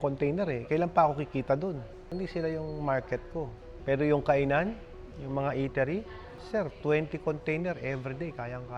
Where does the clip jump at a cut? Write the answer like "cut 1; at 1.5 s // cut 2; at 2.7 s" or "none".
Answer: none